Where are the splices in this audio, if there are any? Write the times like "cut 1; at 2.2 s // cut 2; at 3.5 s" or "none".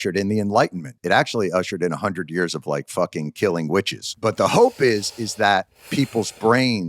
cut 1; at 1.0 s // cut 2; at 4.0 s // cut 3; at 5.8 s